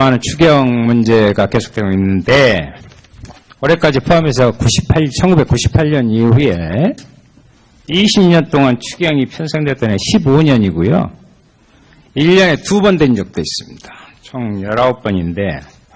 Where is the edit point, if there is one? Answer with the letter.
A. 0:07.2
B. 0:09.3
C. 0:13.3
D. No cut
B